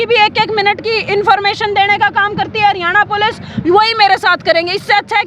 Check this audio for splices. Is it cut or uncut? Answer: uncut